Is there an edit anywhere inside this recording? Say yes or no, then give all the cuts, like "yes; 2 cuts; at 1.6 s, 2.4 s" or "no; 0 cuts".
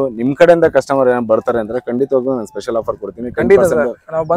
no; 0 cuts